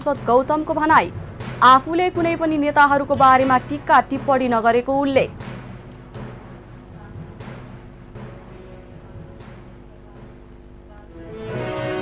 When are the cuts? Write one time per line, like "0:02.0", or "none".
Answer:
none